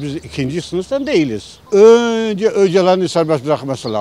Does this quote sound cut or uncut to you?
uncut